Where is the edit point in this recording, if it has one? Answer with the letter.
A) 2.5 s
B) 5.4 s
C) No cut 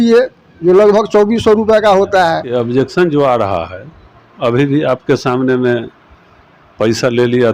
A